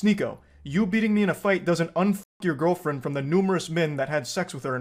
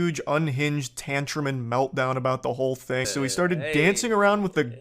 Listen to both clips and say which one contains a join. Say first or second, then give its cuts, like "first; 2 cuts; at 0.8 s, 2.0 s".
second; 1 cut; at 3.1 s